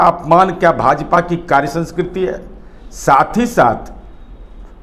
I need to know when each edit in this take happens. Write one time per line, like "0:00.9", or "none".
none